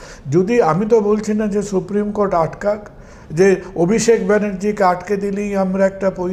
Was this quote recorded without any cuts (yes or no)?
yes